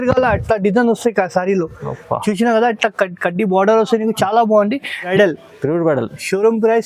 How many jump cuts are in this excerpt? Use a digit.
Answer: 1